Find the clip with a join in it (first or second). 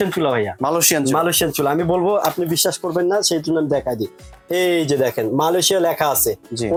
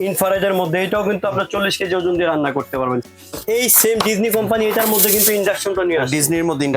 second